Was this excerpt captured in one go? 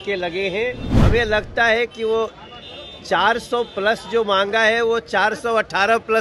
no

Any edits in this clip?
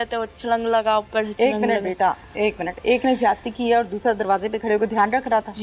no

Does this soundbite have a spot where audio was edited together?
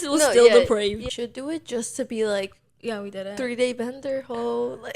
yes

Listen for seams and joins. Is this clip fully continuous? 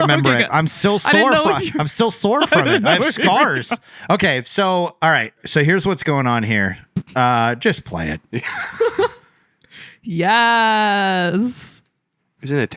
no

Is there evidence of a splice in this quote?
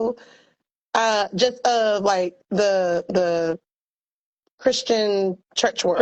no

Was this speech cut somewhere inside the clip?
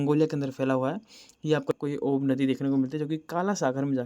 yes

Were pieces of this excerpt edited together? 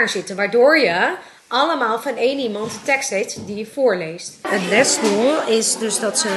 yes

